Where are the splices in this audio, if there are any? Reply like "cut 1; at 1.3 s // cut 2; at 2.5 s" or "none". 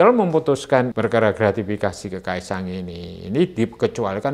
cut 1; at 0.9 s